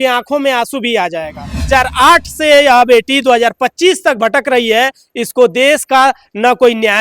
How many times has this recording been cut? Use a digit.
1